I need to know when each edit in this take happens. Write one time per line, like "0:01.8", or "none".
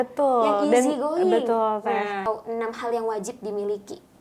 0:02.2